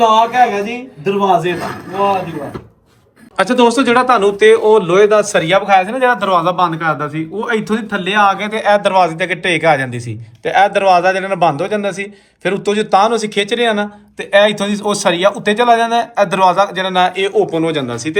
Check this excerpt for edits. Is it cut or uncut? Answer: uncut